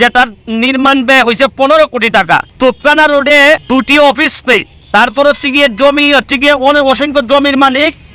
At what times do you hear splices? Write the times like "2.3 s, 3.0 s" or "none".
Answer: 2.5 s, 3.6 s, 4.8 s